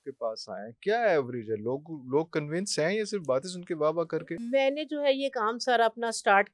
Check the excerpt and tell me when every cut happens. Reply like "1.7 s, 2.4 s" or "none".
4.4 s